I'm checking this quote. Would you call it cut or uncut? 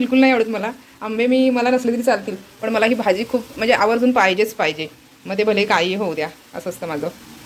uncut